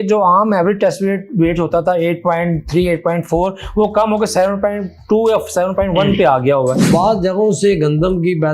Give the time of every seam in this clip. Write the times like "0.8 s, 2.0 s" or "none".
6.9 s